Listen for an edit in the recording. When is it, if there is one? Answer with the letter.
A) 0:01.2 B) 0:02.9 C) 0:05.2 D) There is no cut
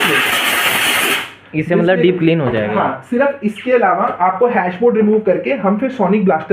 D